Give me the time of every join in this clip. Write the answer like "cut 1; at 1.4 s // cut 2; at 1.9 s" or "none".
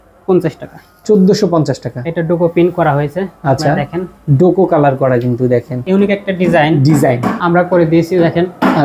cut 1; at 5.8 s // cut 2; at 7.4 s